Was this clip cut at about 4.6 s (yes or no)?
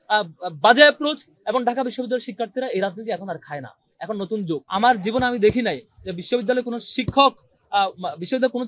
yes